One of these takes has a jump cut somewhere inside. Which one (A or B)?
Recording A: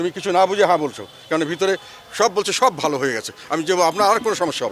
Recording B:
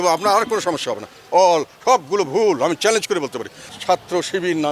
B